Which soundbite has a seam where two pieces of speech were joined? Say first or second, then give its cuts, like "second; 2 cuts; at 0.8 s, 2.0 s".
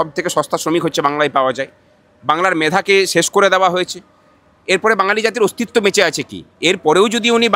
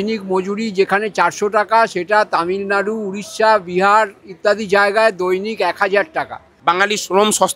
second; 1 cut; at 6.4 s